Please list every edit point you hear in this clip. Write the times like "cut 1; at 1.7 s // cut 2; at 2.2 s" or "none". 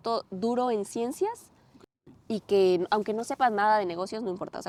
none